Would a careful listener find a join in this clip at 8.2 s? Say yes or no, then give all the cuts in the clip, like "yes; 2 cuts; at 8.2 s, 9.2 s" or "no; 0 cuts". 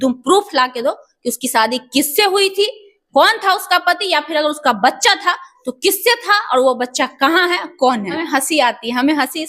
yes; 1 cut; at 8.2 s